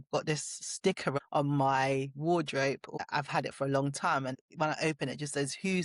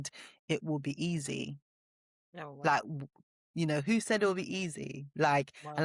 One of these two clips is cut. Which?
first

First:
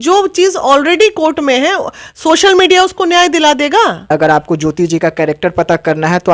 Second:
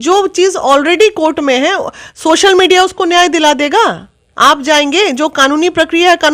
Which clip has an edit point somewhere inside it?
first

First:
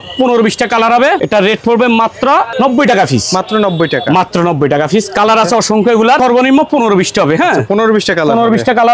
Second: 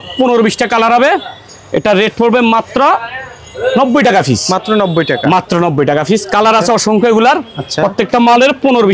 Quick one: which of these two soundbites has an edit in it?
first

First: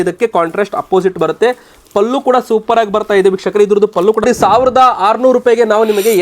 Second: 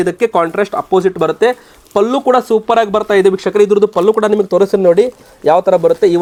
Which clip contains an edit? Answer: first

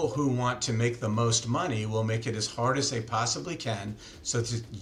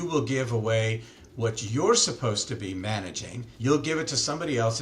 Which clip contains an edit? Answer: second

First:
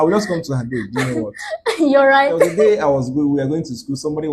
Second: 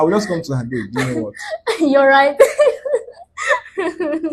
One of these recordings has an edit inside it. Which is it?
first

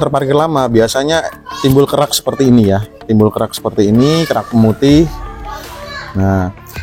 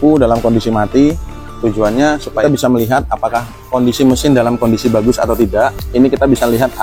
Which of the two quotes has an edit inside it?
second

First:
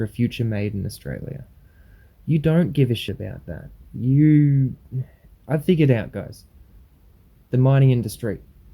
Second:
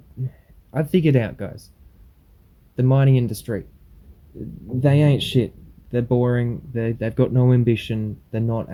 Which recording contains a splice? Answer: first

